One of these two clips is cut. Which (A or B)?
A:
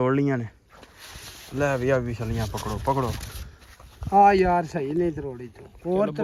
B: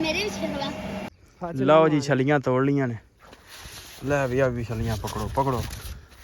B